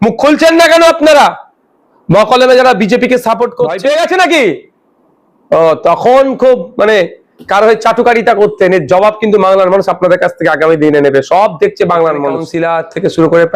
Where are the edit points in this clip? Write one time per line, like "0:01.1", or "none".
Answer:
0:03.8
0:12.5